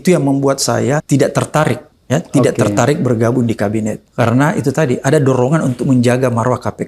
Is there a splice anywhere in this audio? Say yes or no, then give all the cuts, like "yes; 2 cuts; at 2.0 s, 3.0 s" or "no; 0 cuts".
yes; 3 cuts; at 1.0 s, 1.9 s, 4.0 s